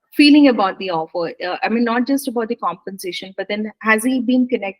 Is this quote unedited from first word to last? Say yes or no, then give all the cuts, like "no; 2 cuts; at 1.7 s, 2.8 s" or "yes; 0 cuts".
yes; 0 cuts